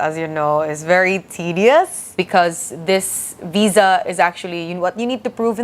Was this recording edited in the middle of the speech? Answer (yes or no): yes